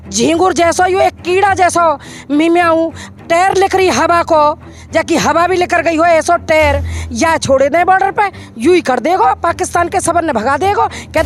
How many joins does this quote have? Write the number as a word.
zero